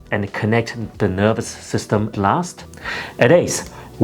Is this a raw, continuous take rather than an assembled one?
no; 1 cut; at 2.1 s

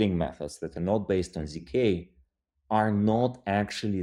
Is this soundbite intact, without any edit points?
yes; 0 cuts

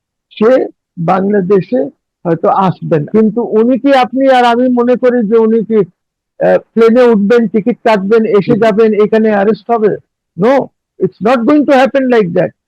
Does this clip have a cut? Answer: yes; 1 cut; at 3.1 s

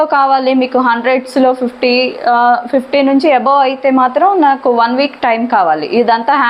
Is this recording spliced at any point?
no; 0 cuts

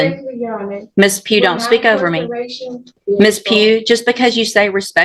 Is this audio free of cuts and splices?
no; 1 cut; at 2.9 s

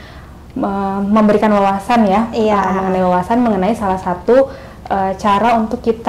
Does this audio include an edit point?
no; 0 cuts

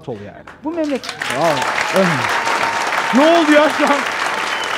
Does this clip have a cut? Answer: no; 0 cuts

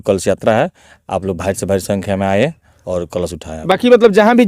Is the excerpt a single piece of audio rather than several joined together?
yes; 0 cuts

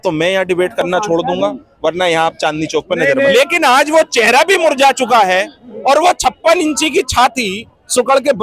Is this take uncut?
no; 1 cut; at 3.4 s

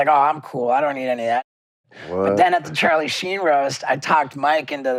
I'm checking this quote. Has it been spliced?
no; 0 cuts

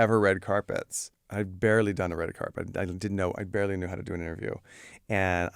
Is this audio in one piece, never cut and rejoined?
yes; 0 cuts

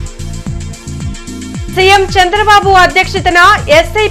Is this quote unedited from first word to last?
yes; 0 cuts

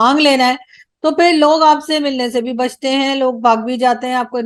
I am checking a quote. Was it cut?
no; 0 cuts

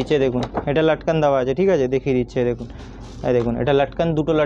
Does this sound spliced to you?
no; 0 cuts

